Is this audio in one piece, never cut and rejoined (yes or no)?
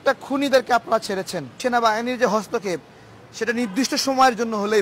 no